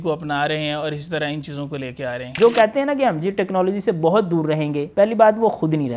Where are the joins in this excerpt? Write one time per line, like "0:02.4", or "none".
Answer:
0:02.3
0:04.8